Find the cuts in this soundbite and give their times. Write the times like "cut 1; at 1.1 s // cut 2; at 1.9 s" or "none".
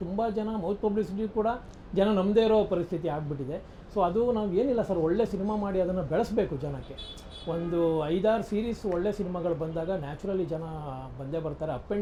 none